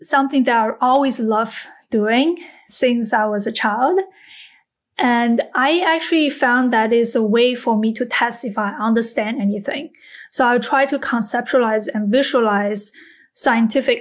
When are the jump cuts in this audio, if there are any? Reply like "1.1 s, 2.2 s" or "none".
none